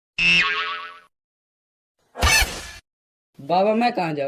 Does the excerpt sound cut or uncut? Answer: uncut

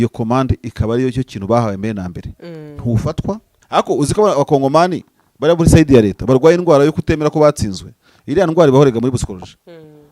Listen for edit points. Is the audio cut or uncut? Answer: cut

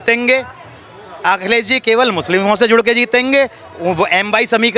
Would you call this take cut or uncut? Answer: uncut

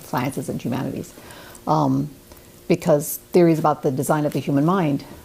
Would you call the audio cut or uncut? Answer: cut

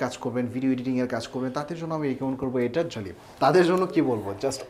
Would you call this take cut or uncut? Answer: cut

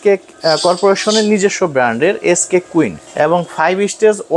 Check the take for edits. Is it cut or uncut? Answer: cut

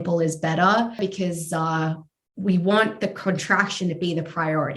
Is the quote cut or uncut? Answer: cut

